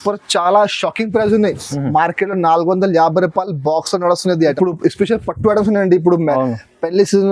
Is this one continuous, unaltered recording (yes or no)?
no